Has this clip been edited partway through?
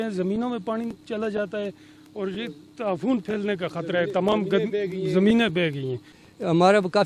yes; 1 cut; at 6.0 s

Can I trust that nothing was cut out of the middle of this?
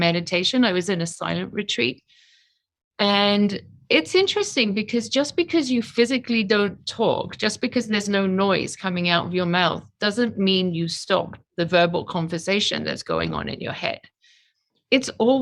yes; 0 cuts

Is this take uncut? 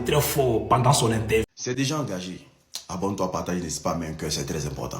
no; 1 cut; at 1.5 s

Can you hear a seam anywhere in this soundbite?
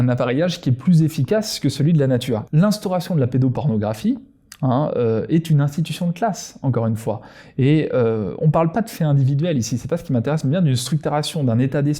yes; 1 cut; at 2.4 s

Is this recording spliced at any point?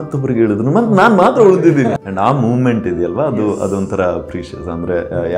yes; 1 cut; at 2.0 s

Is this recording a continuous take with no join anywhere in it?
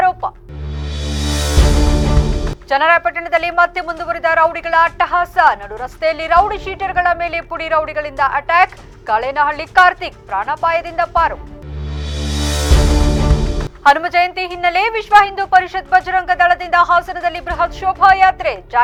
yes; 0 cuts

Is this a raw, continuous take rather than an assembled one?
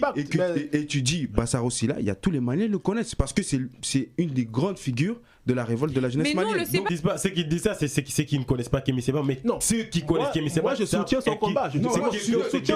no; 1 cut; at 6.9 s

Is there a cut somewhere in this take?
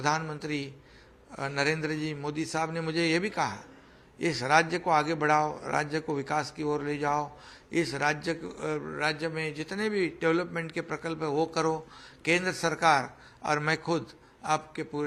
no; 0 cuts

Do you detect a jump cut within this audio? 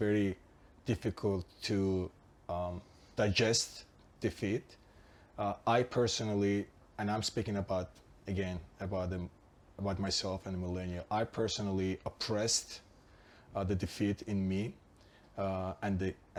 no; 0 cuts

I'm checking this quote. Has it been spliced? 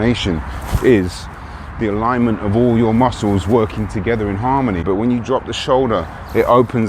yes; 1 cut; at 4.8 s

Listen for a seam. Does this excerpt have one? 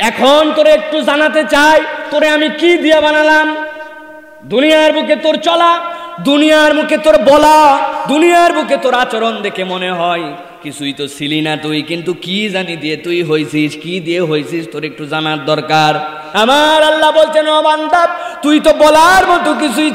yes; 1 cut; at 16.2 s

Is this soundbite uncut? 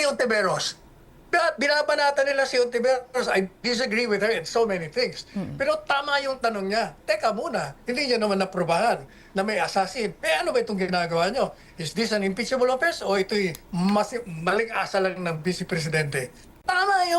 yes; 0 cuts

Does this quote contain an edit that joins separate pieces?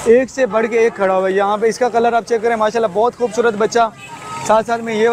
no; 0 cuts

